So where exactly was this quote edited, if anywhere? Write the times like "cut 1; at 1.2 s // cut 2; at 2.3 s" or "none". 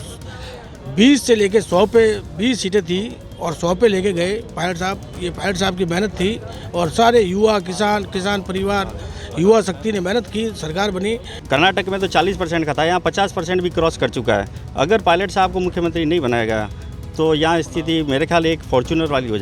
cut 1; at 11.3 s